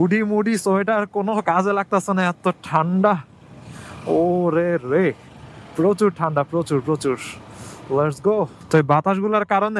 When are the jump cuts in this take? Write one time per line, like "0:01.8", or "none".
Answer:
0:08.6